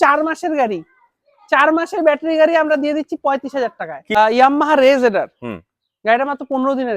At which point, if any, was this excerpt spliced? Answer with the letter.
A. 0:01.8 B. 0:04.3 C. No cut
B